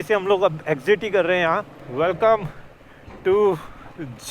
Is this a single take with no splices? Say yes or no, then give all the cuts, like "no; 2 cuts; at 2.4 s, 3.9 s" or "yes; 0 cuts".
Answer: no; 1 cut; at 1.8 s